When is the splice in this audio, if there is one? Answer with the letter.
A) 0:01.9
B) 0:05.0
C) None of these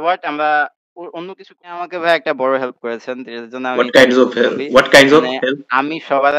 A